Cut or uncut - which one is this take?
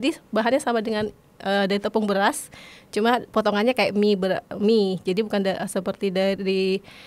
uncut